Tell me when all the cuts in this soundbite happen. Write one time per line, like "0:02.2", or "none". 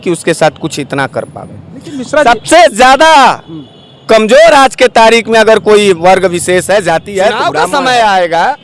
0:07.5